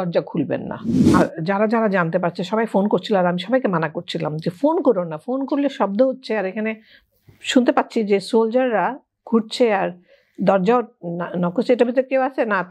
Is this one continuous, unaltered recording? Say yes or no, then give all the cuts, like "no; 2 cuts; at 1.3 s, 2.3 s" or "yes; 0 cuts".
no; 1 cut; at 1.0 s